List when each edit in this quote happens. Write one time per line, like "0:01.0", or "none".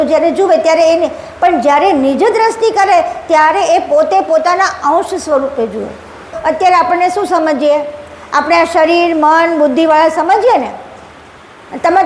0:06.3